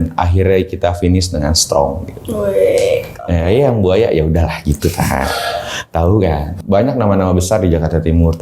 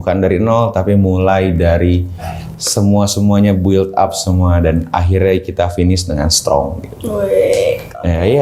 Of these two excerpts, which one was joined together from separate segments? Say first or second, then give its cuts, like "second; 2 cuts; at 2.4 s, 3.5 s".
first; 1 cut; at 6.5 s